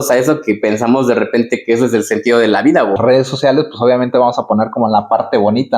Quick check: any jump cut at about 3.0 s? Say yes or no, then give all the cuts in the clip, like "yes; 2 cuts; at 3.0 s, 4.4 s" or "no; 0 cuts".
yes; 1 cut; at 3.0 s